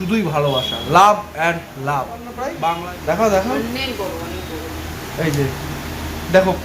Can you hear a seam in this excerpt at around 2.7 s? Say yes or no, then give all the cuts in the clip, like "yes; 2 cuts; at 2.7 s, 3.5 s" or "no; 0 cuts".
yes; 1 cut; at 2.7 s